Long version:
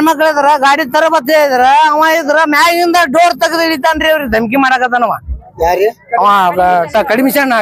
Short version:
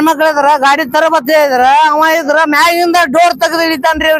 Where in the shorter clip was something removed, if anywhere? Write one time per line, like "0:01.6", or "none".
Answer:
none